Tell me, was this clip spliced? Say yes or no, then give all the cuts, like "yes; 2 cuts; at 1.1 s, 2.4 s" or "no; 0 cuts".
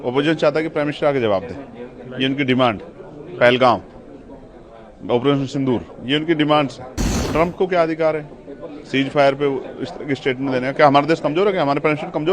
yes; 1 cut; at 7.2 s